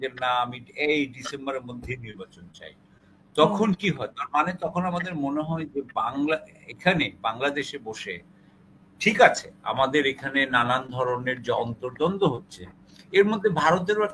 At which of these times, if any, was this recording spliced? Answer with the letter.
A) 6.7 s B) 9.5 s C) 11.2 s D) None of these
D